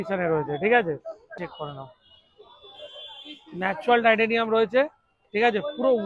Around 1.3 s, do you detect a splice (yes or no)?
yes